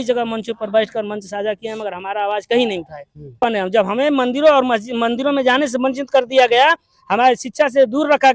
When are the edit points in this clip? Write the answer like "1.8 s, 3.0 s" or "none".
3.4 s